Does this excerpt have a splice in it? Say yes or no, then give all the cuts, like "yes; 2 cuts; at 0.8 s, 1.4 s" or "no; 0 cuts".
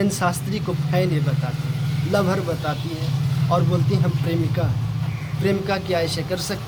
no; 0 cuts